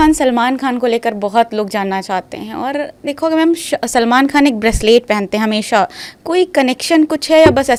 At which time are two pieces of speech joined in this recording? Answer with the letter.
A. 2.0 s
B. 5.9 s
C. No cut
C